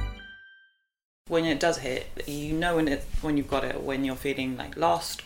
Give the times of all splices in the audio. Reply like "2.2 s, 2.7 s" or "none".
1.2 s